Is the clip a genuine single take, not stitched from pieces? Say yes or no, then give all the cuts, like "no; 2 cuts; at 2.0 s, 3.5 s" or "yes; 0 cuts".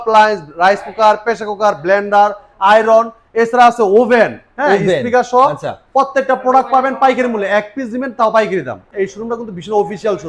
no; 1 cut; at 8.8 s